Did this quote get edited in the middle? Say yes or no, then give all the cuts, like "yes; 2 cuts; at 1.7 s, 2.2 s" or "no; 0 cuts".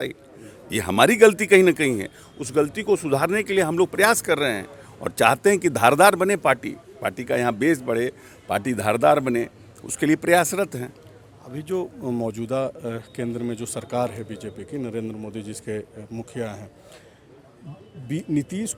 no; 0 cuts